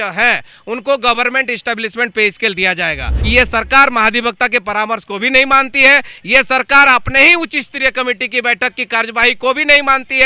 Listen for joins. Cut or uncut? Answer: cut